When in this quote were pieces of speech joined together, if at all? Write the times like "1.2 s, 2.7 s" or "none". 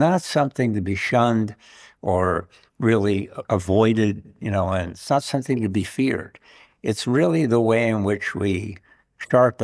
none